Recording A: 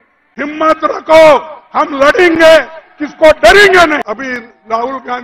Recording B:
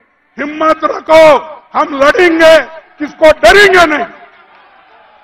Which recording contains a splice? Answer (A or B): A